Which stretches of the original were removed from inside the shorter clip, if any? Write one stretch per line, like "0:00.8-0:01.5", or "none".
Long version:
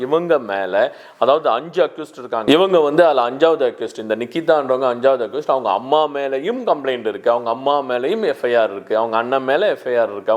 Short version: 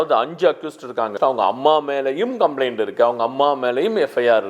0:02.4-0:05.3